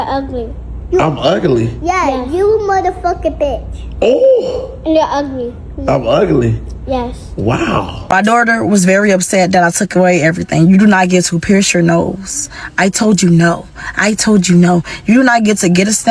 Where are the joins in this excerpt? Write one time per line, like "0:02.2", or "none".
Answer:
0:08.1